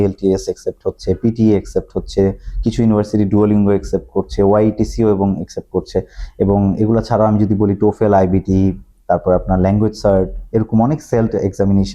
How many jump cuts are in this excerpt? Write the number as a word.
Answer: zero